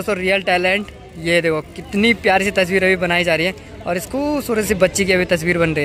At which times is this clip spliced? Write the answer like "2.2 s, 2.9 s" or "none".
none